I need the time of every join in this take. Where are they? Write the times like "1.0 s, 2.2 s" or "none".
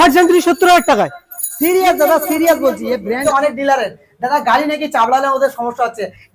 3.2 s